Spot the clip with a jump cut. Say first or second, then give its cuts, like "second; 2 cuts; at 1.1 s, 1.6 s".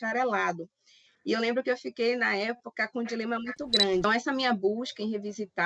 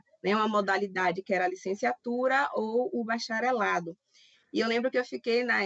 first; 1 cut; at 4.0 s